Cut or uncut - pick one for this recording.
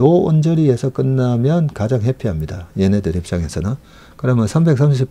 uncut